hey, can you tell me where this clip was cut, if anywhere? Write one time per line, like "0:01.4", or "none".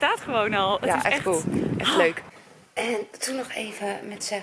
0:02.3